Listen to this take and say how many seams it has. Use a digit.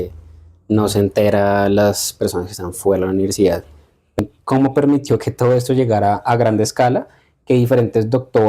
1